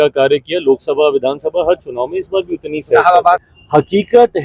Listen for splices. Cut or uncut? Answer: cut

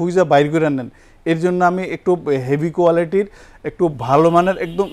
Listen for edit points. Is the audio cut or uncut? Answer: uncut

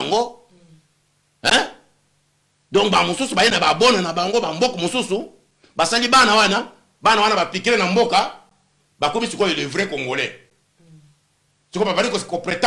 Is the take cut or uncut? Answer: uncut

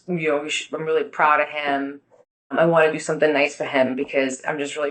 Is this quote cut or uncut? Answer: uncut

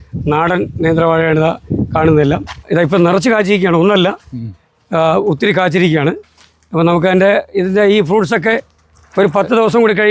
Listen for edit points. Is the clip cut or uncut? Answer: cut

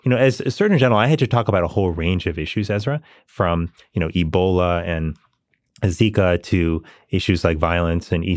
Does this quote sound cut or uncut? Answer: uncut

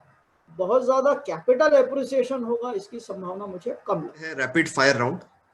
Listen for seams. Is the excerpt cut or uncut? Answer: cut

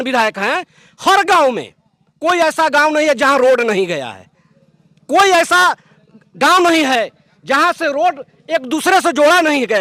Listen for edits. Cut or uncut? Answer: uncut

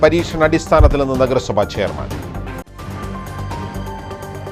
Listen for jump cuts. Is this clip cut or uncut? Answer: uncut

